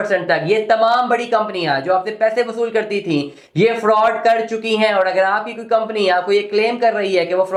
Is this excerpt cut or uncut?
uncut